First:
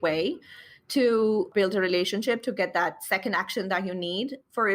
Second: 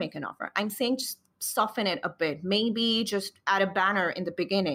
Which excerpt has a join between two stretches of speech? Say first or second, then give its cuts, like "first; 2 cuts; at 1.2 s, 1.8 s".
first; 1 cut; at 1.5 s